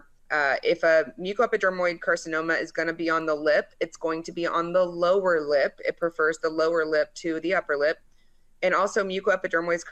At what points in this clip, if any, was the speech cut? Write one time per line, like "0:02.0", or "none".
none